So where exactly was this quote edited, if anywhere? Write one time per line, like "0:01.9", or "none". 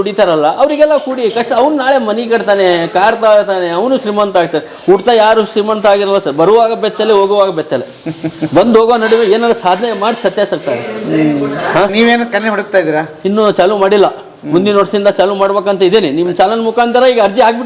0:11.9